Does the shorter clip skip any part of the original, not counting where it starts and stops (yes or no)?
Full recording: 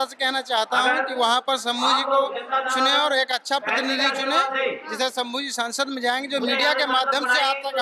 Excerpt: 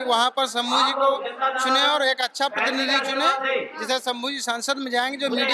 no